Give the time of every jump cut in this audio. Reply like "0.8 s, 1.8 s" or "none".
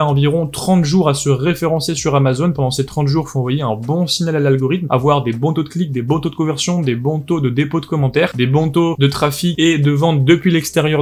none